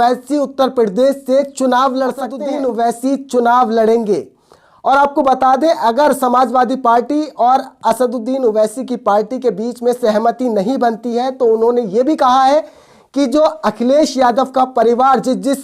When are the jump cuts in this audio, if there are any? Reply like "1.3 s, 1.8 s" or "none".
2.4 s